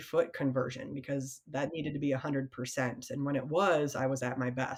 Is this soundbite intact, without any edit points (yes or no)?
yes